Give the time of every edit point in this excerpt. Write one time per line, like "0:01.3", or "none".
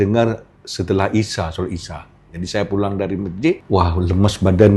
0:03.6